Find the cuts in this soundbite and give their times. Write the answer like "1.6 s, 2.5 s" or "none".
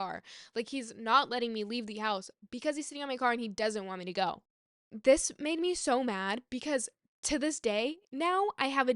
4.5 s